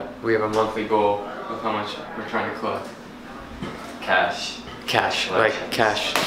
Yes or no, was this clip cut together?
no